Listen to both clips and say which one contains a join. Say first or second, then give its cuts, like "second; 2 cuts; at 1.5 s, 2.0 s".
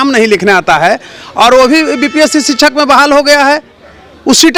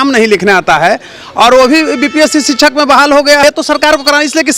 second; 1 cut; at 3.4 s